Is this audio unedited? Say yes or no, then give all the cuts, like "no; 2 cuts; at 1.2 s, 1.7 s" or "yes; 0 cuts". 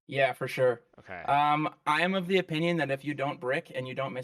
yes; 0 cuts